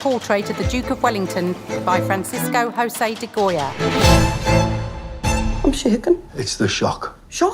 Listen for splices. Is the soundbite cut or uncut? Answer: cut